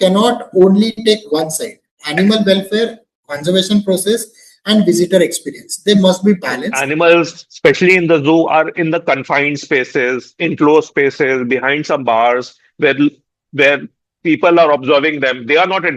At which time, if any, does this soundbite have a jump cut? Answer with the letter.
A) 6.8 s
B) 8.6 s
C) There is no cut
A